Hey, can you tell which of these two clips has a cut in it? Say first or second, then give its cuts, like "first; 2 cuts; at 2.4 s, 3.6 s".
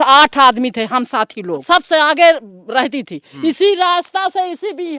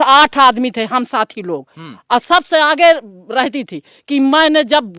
first; 2 cuts; at 1.6 s, 3.3 s